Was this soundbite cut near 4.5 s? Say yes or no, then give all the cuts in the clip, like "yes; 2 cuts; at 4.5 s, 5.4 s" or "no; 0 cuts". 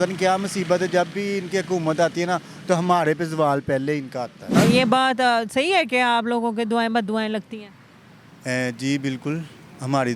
yes; 1 cut; at 4.5 s